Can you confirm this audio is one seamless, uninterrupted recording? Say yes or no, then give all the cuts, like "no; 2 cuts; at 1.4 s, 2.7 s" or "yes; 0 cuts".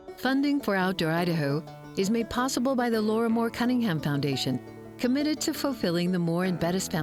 yes; 0 cuts